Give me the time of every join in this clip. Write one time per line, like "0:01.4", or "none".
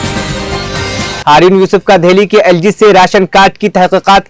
0:01.2